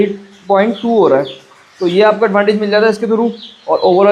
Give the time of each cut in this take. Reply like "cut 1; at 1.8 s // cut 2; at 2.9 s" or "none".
none

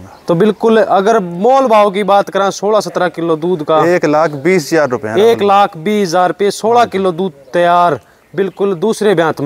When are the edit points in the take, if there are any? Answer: none

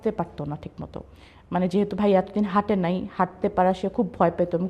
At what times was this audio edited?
none

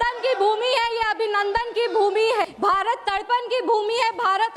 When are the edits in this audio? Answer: cut 1; at 2.5 s

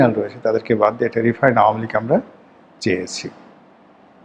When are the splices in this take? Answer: none

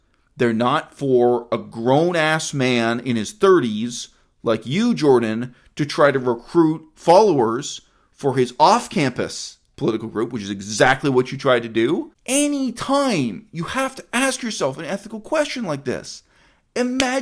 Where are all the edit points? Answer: cut 1; at 12.2 s

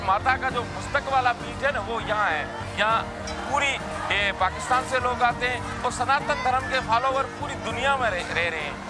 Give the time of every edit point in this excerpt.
cut 1; at 2.6 s

